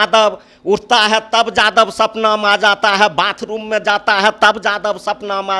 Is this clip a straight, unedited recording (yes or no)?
yes